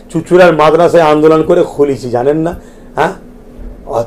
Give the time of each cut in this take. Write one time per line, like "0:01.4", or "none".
none